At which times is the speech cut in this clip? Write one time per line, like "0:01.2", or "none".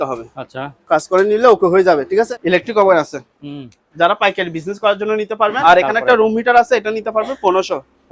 0:02.3
0:05.6